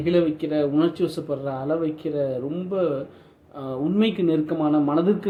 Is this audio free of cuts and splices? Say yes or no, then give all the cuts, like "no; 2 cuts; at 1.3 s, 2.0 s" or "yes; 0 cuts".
yes; 0 cuts